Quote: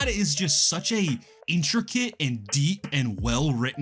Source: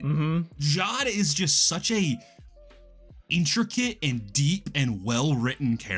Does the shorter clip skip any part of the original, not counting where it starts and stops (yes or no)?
yes